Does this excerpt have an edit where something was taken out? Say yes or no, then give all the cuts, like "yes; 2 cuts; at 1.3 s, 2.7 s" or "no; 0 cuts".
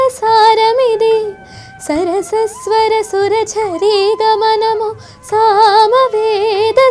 no; 0 cuts